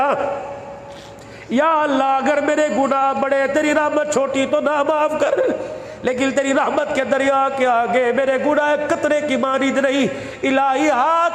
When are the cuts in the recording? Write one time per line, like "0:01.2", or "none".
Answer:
none